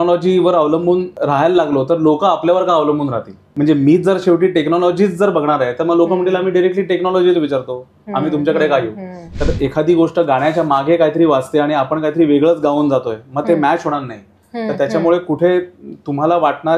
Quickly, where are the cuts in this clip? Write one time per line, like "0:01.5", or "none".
0:01.1
0:03.4
0:09.3